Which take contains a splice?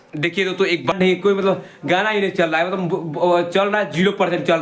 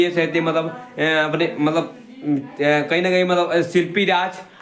first; 1 cut; at 0.9 s

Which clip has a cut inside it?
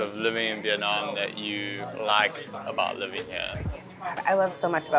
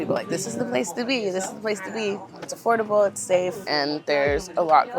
second; 2 cuts; at 2.5 s, 3.6 s

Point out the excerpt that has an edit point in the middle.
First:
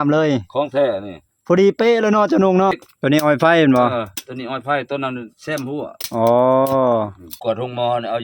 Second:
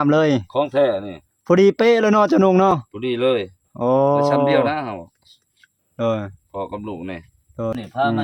first; 2 cuts; at 2.9 s, 7.3 s

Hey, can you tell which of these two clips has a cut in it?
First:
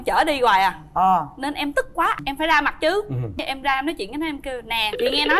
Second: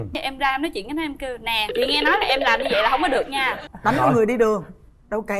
second; 1 cut; at 3.6 s

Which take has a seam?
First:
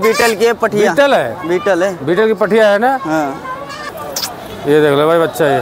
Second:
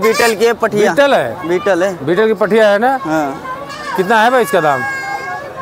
first; 1 cut; at 3.8 s

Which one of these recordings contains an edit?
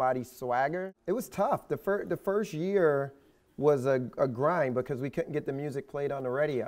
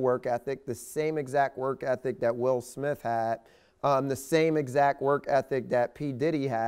first; 1 cut; at 0.9 s

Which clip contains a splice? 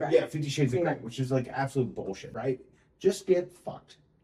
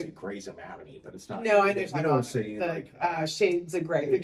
first; 1 cut; at 2.2 s

